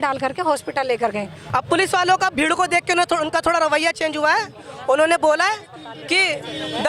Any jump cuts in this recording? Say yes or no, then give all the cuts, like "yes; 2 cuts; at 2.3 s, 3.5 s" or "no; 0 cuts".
yes; 1 cut; at 1.4 s